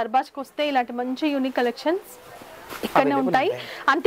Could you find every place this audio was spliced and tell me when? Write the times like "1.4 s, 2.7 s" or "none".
none